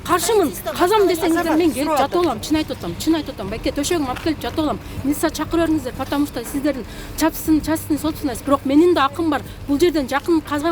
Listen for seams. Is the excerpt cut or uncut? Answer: uncut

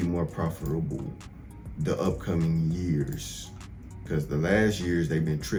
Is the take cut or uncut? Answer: uncut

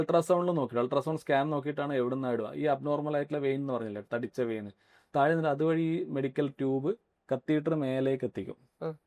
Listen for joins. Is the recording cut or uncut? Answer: uncut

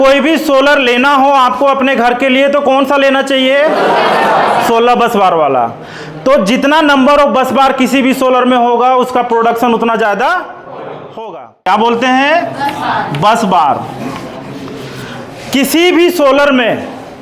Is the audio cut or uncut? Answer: cut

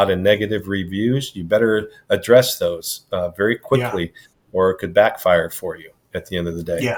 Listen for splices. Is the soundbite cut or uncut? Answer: uncut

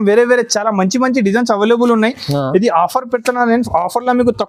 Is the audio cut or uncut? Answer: uncut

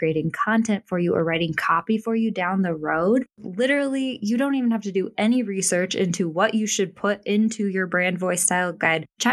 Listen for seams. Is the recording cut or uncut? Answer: cut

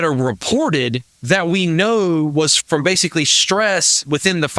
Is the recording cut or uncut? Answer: cut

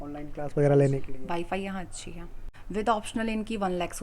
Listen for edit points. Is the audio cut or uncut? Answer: cut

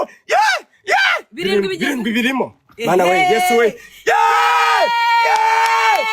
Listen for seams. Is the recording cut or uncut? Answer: uncut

